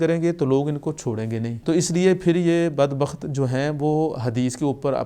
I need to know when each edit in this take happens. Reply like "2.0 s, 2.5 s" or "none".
1.5 s